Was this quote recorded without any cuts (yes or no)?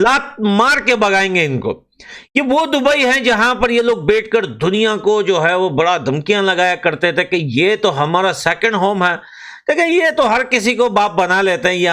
yes